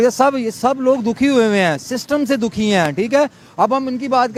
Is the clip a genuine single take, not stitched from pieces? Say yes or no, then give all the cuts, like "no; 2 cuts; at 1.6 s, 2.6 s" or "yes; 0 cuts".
yes; 0 cuts